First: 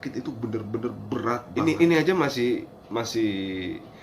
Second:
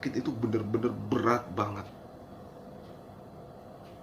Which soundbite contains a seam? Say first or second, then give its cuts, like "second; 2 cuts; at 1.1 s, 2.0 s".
first; 1 cut; at 1.5 s